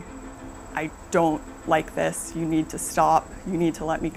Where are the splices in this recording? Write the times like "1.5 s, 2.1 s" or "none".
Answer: none

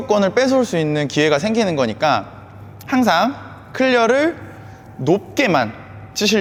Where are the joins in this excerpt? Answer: none

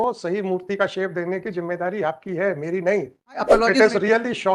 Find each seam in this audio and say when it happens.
3.4 s

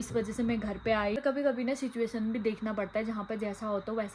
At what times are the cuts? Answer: 1.2 s

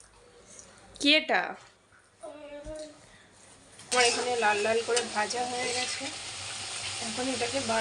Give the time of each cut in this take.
3.9 s

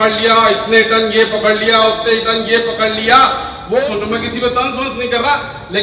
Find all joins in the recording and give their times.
3.8 s

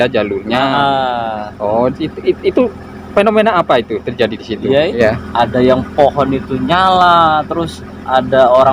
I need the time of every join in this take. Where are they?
4.9 s

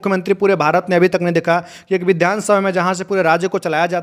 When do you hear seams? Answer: none

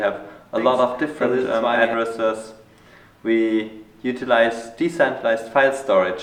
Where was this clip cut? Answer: none

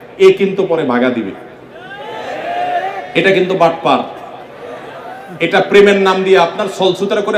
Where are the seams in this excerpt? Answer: none

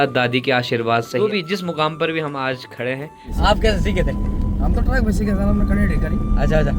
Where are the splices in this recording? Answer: 1.3 s, 3.3 s

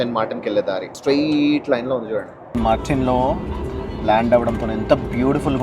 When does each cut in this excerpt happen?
0.9 s, 2.4 s

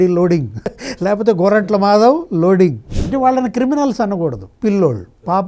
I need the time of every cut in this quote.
2.9 s

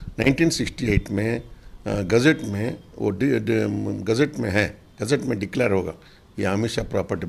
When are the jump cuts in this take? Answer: none

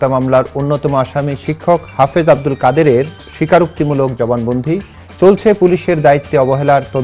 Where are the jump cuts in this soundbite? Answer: none

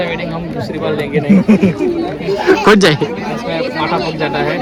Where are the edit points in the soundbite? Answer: none

